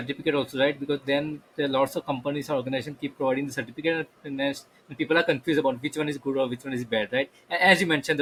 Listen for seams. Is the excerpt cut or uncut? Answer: uncut